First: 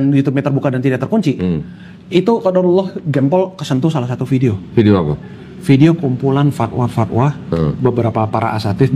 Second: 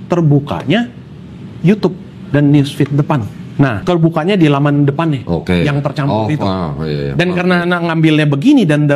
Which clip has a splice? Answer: second; 1 cut; at 3.8 s

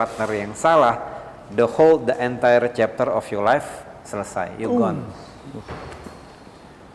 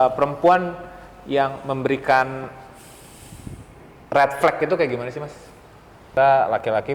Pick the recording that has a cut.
second; 1 cut; at 6.0 s

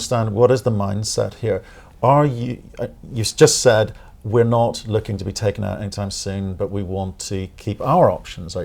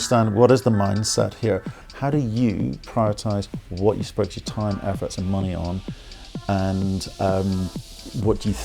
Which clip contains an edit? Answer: second; 1 cut; at 1.8 s

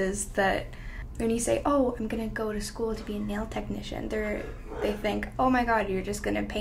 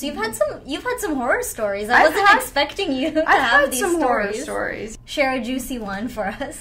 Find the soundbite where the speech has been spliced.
second; 1 cut; at 4.8 s

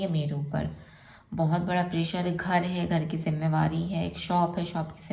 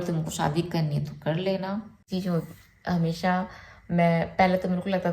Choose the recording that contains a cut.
second; 1 cut; at 2.0 s

